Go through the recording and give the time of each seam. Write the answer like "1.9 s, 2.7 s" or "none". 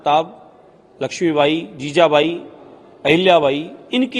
none